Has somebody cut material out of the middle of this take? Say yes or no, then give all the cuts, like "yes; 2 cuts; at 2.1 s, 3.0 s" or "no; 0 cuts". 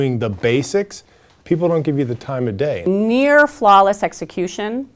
yes; 1 cut; at 2.9 s